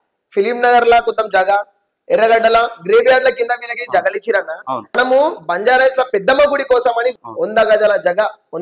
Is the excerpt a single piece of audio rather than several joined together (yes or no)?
no